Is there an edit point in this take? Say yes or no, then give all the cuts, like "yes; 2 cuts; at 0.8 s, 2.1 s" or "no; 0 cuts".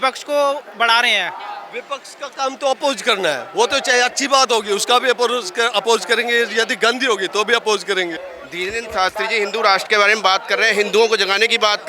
yes; 1 cut; at 8.3 s